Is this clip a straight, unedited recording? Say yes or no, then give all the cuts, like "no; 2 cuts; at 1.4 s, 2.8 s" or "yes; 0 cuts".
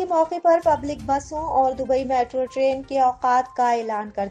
yes; 0 cuts